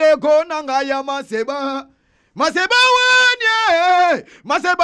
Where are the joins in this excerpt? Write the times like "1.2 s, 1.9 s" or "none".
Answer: none